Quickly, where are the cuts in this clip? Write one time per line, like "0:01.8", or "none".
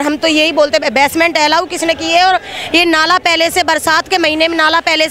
none